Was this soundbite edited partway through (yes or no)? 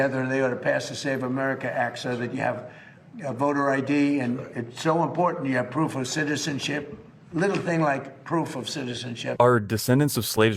yes